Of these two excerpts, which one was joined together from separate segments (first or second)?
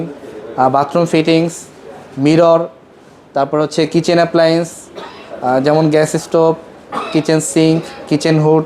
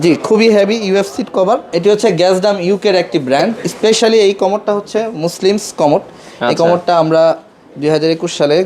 second